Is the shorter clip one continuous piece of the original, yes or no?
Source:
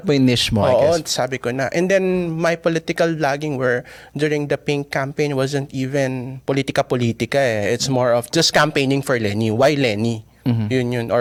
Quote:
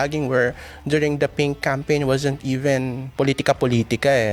yes